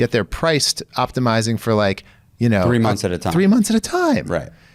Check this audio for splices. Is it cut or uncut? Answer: uncut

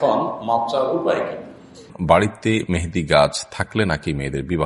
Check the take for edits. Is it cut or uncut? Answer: cut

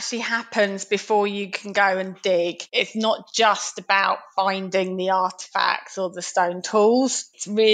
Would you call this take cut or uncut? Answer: cut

